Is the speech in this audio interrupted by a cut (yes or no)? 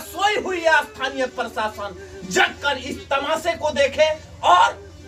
no